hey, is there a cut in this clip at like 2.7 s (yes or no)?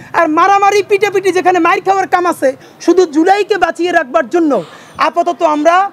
yes